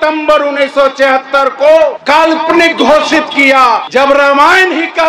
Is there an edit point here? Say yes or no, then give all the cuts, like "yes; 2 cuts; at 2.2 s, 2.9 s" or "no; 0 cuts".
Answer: yes; 2 cuts; at 2.2 s, 3.8 s